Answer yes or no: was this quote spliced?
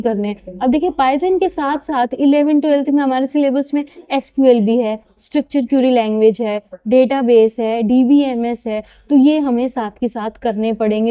no